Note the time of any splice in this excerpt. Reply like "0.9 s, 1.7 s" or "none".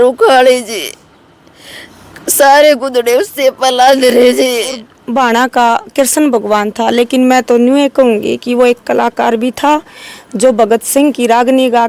4.9 s